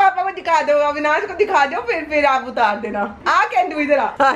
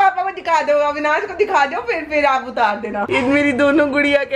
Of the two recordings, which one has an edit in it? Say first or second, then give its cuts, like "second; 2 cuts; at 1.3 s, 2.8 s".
second; 1 cut; at 3.1 s